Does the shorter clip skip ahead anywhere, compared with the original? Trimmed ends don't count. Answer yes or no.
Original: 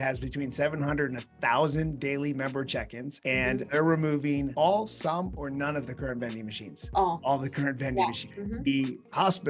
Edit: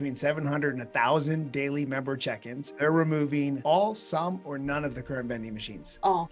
yes